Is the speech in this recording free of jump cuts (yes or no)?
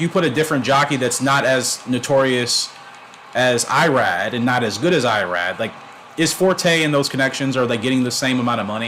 yes